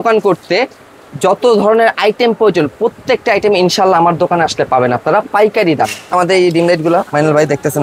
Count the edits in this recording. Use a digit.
1